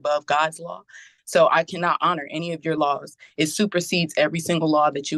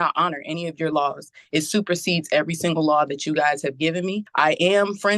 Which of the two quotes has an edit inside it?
second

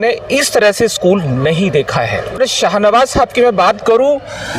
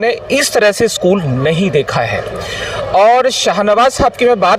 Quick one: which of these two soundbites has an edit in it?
first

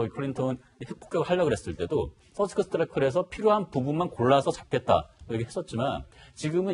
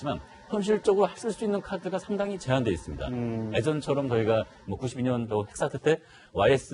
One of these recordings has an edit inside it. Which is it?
second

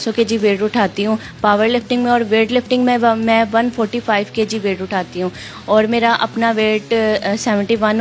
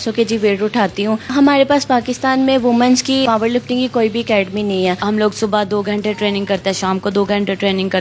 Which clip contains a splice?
second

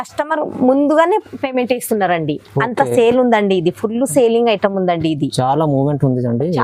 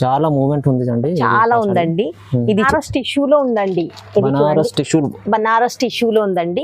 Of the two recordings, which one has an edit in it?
second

